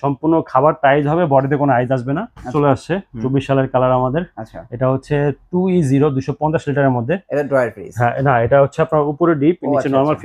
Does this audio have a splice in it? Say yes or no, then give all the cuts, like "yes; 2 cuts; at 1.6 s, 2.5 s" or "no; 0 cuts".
yes; 1 cut; at 2.5 s